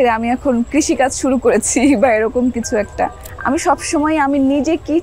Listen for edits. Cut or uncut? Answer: cut